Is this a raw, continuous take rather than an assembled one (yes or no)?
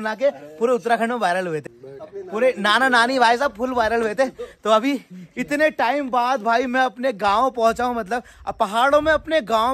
yes